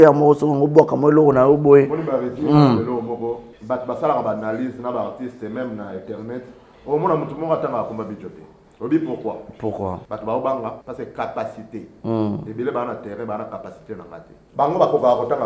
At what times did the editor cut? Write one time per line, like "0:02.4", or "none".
0:03.5
0:10.0
0:10.8
0:14.3